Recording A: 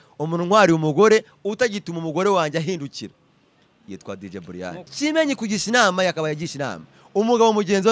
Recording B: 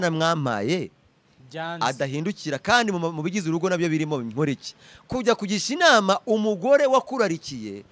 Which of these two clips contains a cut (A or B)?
A